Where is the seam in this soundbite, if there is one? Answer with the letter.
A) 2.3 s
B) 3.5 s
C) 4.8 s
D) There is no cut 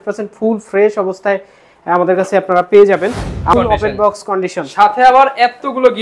B